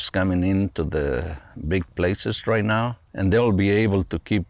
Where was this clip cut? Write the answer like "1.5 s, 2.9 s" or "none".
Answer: 3.0 s